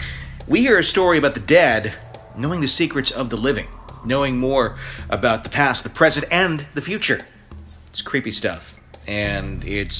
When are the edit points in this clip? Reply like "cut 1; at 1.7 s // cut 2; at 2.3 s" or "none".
none